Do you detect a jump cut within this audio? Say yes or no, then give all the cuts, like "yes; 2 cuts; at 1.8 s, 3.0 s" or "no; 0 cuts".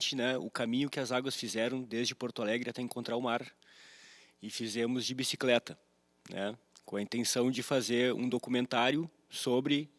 no; 0 cuts